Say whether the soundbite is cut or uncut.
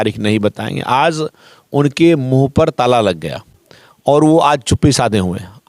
uncut